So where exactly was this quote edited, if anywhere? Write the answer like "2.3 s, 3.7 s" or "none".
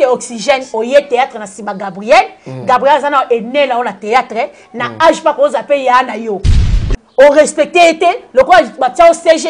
none